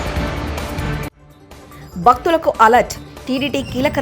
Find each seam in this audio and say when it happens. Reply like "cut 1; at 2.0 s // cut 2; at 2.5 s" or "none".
cut 1; at 1.2 s